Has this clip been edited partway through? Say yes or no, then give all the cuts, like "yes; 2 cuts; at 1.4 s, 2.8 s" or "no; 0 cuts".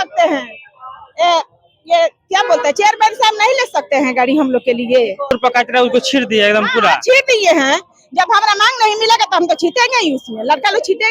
yes; 1 cut; at 5.3 s